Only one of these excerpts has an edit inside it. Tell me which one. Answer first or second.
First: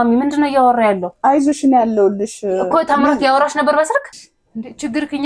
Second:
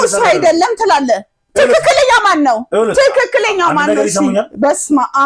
first